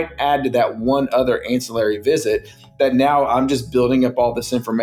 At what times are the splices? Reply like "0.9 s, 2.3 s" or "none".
none

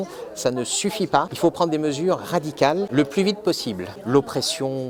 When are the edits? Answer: 1.3 s, 2.9 s, 3.9 s

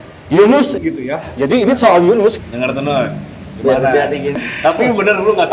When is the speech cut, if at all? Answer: 2.4 s, 4.4 s

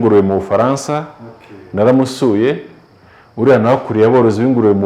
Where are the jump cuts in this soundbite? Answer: none

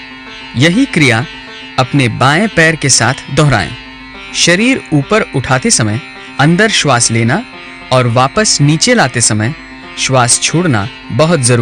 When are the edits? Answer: none

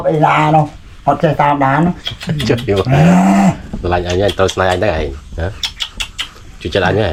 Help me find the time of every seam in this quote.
none

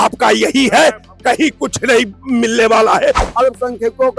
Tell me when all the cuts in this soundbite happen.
3.3 s

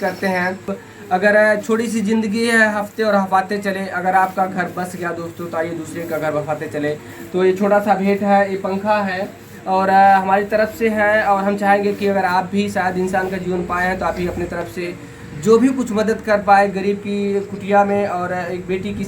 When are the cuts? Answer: 1.2 s

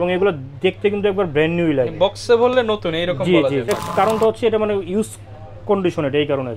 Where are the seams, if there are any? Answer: 3.7 s

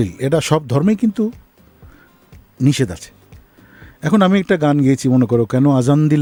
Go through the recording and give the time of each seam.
none

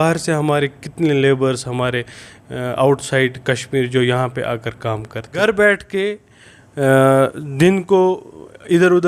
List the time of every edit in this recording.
5.4 s

